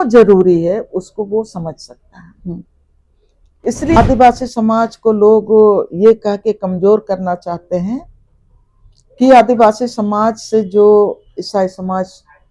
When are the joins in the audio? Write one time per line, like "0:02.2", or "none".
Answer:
0:04.0